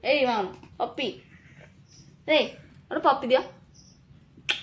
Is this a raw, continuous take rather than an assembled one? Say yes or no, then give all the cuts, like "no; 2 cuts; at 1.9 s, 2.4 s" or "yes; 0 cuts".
yes; 0 cuts